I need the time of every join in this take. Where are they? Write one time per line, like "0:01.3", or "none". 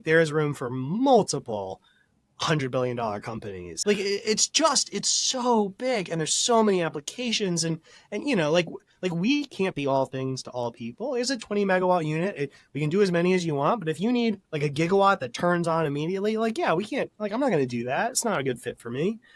0:03.7